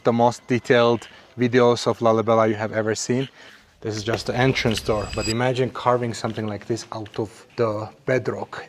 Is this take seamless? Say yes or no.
no